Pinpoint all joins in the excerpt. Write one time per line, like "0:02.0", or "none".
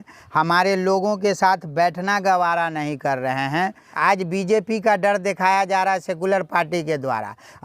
0:03.8